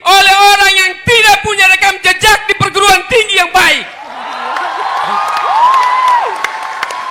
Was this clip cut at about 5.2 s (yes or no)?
no